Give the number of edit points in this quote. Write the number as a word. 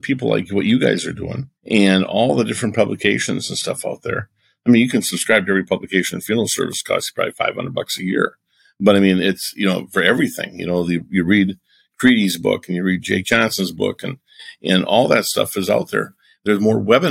zero